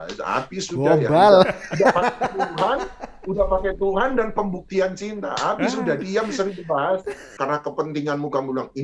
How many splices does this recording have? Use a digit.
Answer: 1